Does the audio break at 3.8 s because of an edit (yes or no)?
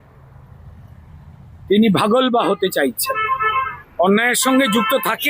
yes